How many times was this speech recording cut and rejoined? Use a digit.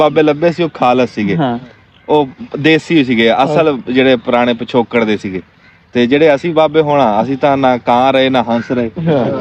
0